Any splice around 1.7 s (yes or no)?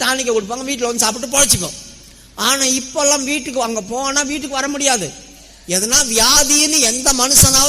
no